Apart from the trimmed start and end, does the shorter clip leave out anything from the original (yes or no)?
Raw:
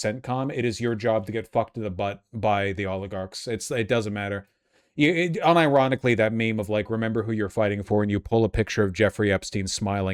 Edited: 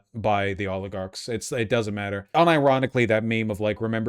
yes